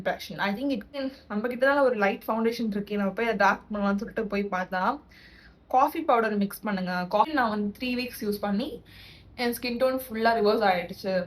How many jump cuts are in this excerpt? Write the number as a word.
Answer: two